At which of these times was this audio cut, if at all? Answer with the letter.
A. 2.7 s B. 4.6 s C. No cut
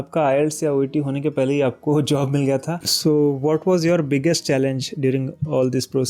A